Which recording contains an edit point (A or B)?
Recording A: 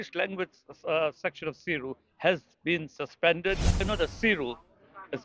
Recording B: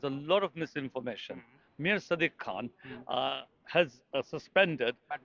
A